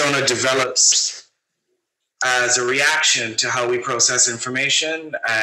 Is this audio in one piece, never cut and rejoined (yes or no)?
yes